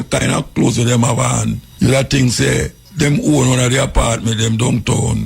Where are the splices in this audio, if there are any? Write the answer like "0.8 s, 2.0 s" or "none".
1.7 s, 2.8 s

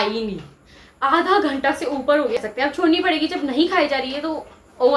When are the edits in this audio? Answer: 2.4 s

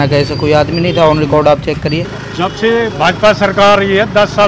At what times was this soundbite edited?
2.0 s

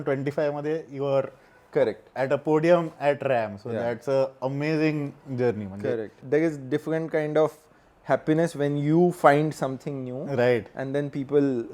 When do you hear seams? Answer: 6.2 s

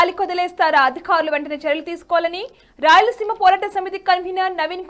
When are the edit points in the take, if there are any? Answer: none

